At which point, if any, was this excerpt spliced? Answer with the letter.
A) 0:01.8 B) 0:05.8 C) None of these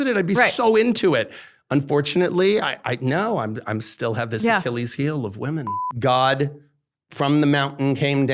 B